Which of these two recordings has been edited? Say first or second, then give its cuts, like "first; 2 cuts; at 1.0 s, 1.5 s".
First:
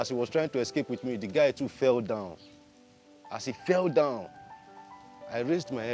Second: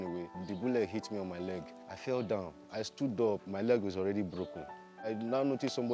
second; 1 cut; at 5.0 s